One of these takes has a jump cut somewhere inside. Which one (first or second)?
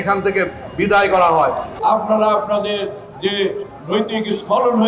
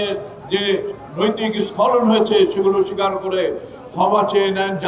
first